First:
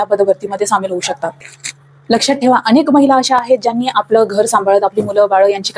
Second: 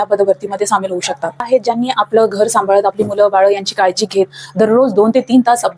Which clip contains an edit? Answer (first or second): second